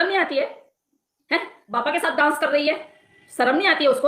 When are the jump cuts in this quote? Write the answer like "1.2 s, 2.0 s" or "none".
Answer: 1.6 s